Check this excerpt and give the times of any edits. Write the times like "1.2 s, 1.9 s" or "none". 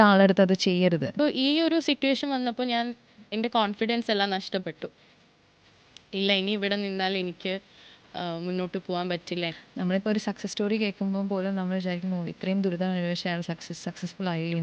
1.1 s, 9.6 s